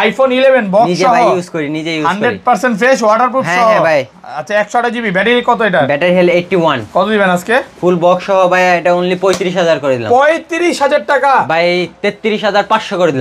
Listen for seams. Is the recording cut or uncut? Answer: uncut